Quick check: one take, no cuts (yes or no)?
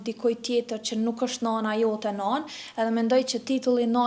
yes